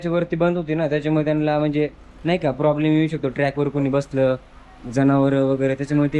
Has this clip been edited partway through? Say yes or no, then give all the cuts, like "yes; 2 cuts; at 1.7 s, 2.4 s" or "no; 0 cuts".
no; 0 cuts